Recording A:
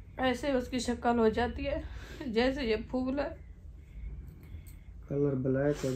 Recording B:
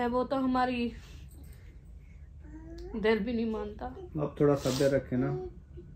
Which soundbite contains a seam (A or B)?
B